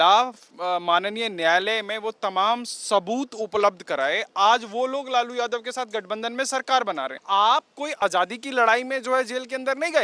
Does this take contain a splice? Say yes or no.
yes